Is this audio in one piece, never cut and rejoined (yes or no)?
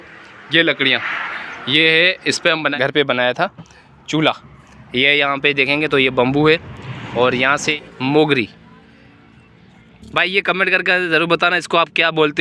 no